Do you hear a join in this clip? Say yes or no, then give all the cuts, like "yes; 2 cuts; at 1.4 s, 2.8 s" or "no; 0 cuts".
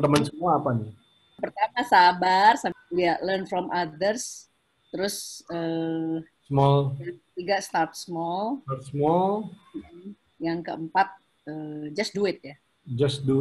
yes; 2 cuts; at 1.3 s, 2.7 s